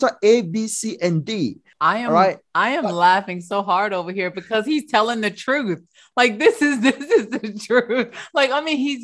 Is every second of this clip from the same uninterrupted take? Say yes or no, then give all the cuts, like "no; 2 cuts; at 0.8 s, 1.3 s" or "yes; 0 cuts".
no; 1 cut; at 1.7 s